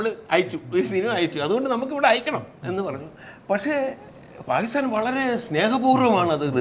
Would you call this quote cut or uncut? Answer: uncut